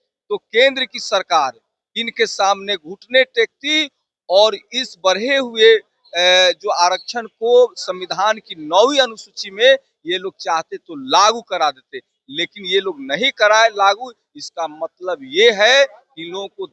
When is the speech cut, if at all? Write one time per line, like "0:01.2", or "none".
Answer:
none